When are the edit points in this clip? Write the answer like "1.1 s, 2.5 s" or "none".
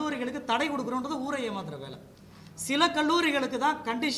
none